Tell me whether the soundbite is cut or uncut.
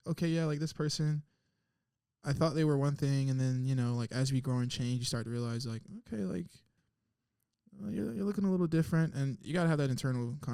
uncut